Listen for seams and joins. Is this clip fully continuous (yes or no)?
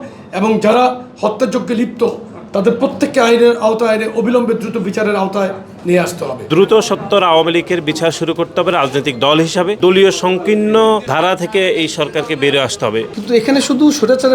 no